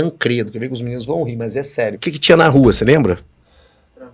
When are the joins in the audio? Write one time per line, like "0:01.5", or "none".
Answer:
0:02.0